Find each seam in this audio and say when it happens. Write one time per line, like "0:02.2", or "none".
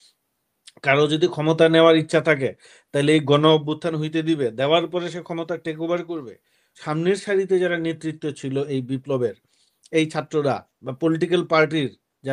0:06.8